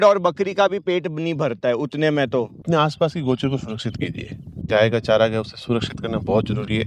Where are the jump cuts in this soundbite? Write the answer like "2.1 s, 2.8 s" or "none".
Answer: 2.7 s